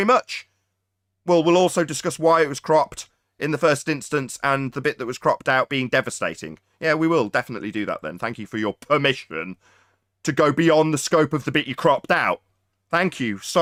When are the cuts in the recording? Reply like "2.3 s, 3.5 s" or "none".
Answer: none